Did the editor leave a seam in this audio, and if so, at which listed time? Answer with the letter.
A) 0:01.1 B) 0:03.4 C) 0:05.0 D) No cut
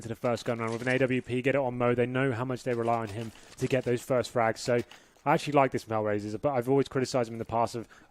D